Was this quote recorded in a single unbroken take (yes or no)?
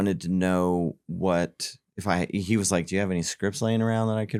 yes